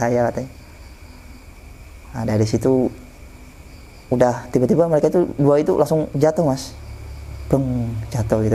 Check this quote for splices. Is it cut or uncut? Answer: uncut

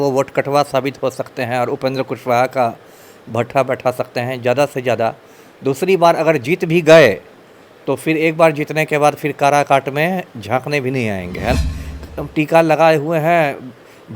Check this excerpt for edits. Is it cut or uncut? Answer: cut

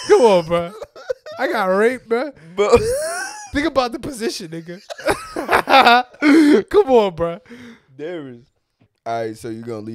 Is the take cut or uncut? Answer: cut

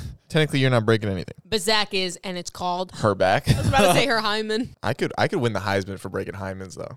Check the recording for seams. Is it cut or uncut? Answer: cut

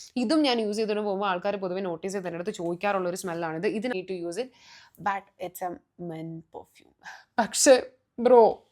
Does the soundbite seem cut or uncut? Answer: cut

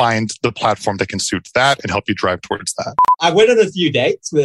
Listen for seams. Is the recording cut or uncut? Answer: cut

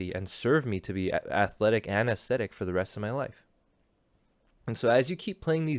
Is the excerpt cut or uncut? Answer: uncut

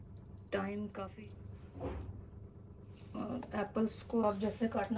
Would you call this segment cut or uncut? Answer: cut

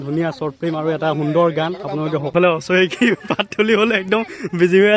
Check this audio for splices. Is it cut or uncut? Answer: cut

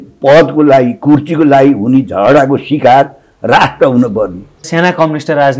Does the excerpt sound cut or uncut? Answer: cut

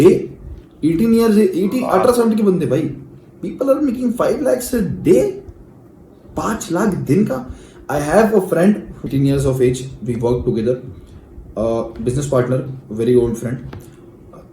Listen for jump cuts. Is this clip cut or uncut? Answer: cut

